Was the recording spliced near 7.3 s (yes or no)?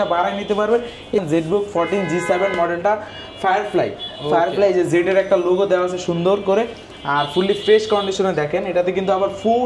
no